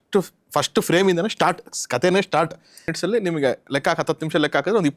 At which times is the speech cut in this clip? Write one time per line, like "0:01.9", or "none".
0:02.9